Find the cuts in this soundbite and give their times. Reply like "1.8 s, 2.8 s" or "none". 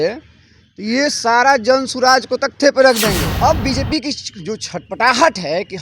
3.3 s